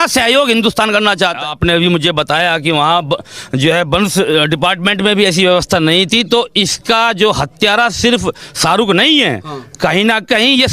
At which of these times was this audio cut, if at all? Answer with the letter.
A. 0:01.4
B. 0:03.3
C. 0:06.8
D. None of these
A